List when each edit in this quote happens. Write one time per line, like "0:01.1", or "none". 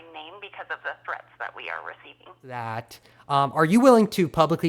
0:02.6